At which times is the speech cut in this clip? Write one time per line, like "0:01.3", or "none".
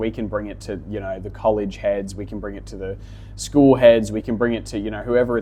none

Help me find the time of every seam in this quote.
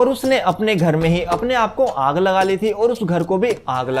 none

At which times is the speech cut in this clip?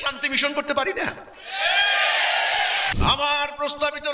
0:03.0

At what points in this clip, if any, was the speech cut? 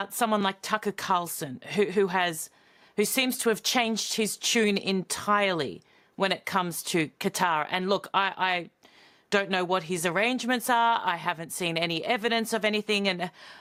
none

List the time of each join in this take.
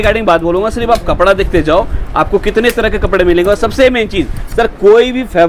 none

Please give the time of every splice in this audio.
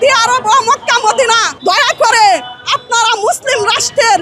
0:01.5

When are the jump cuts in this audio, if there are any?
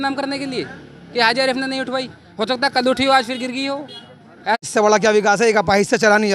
0:04.7

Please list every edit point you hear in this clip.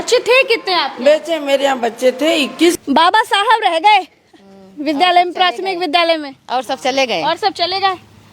0:02.7

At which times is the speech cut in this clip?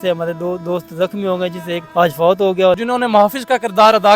0:01.8
0:02.8

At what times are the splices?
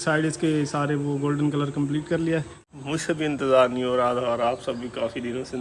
0:02.6

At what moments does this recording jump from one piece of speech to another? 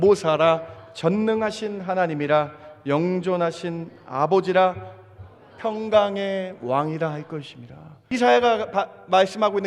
0:08.1

